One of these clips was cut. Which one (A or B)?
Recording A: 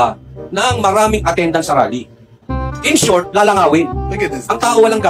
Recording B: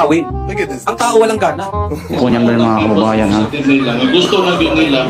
B